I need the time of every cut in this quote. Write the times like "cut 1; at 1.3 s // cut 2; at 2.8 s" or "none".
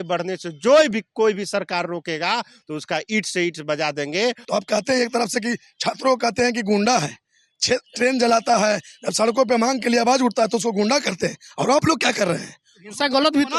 cut 1; at 4.4 s